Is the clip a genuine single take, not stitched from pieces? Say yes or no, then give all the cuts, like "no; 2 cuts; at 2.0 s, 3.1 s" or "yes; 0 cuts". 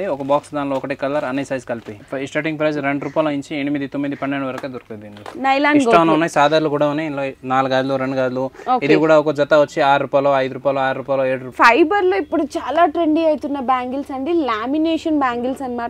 no; 3 cuts; at 2.0 s, 5.3 s, 11.5 s